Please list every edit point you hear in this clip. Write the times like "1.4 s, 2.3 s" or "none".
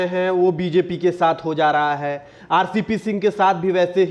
none